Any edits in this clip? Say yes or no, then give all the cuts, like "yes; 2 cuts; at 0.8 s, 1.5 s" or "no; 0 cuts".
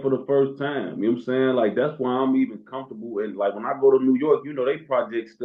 no; 0 cuts